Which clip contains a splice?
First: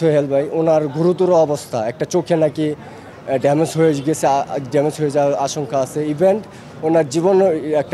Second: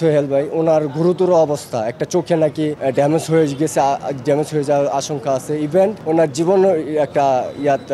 second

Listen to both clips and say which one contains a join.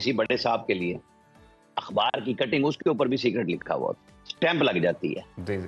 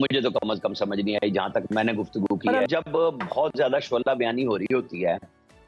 second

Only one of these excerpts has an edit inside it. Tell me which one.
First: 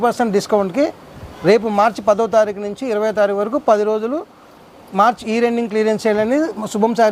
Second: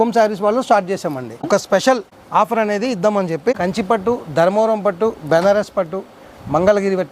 second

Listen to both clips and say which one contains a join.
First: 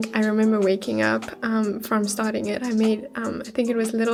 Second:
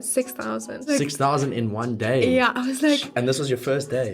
second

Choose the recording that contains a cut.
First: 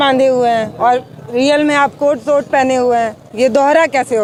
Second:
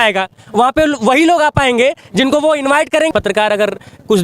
second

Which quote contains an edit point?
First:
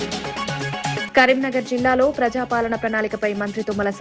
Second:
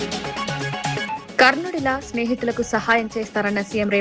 first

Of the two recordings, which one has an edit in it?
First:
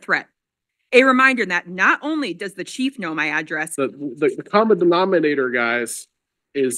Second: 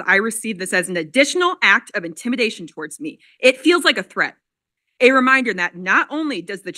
first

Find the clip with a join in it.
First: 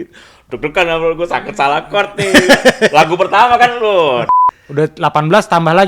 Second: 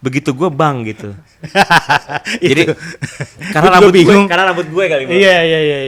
first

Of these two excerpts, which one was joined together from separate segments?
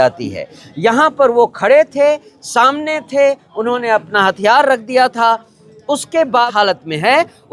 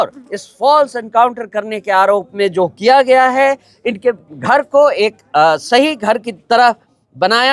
first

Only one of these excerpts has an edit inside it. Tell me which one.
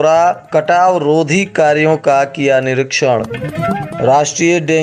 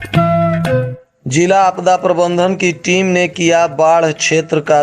second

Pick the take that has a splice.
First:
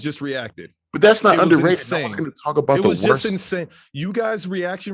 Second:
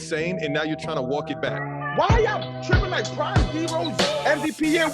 second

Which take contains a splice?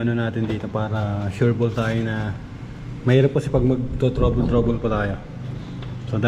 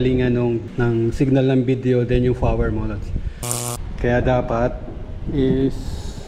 second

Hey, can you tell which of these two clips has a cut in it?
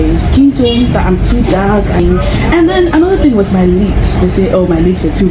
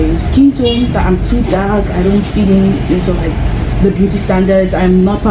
first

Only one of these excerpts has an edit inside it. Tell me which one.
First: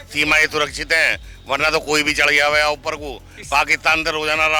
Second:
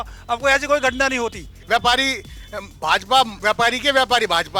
second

